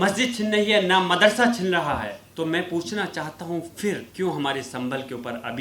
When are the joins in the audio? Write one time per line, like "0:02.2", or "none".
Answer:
0:02.2
0:04.1